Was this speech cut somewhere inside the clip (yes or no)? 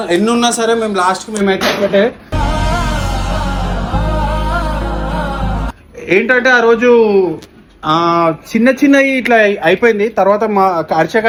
no